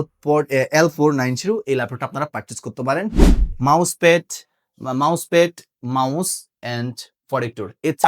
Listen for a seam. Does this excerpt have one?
yes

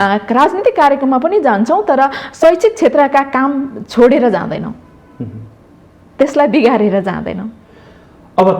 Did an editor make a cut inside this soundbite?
no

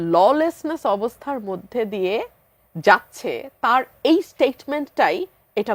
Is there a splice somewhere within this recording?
no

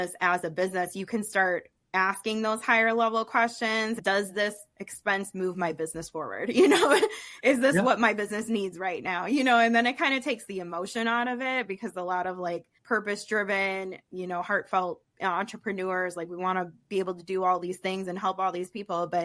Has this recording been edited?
yes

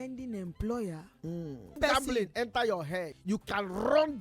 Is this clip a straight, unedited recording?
no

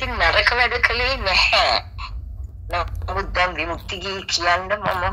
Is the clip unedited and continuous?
yes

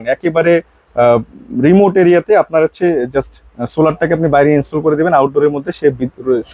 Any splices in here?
no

